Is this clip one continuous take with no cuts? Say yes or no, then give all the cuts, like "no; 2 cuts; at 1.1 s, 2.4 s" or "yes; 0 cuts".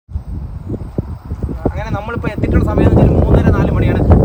yes; 0 cuts